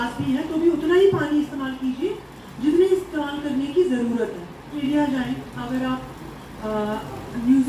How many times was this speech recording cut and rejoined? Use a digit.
1